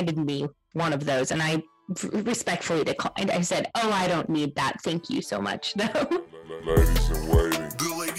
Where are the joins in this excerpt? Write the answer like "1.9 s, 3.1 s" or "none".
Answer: 6.5 s